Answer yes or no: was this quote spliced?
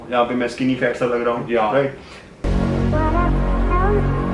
no